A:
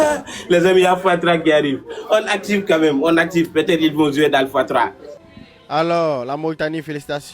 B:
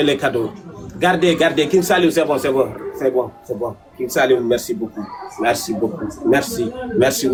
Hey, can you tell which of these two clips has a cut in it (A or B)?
A